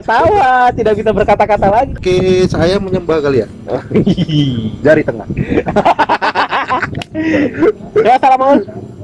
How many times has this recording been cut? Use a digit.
1